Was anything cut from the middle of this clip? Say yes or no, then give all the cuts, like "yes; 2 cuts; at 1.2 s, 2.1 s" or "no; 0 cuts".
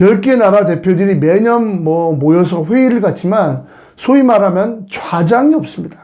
no; 0 cuts